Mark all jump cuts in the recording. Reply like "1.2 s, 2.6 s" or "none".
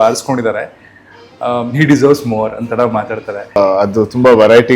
3.6 s